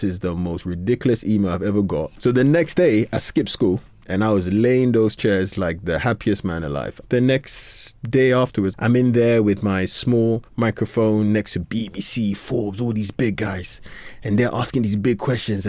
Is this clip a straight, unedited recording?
no; 4 cuts; at 2.1 s, 4.0 s, 7.0 s, 8.7 s

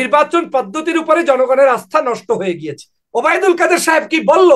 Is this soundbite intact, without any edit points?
no; 1 cut; at 3.0 s

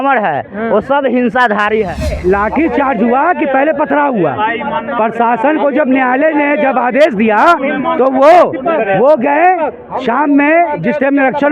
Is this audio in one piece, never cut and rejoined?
no; 1 cut; at 2.1 s

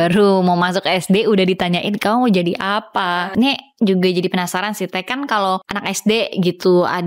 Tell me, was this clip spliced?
yes; 2 cuts; at 3.3 s, 5.7 s

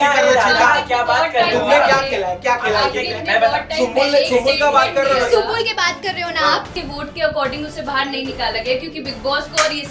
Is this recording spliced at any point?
yes; 1 cut; at 6.7 s

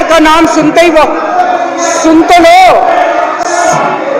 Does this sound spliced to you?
no; 0 cuts

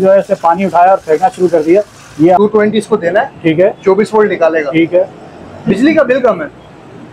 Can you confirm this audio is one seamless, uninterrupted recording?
no; 1 cut; at 2.4 s

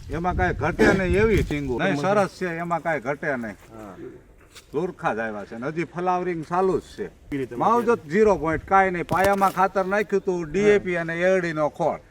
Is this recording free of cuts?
no; 2 cuts; at 1.8 s, 7.4 s

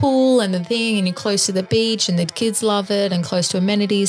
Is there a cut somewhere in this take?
no; 0 cuts

